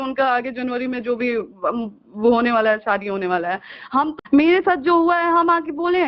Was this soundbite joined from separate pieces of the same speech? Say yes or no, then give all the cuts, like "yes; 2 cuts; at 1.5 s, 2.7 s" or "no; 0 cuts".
yes; 1 cut; at 4.2 s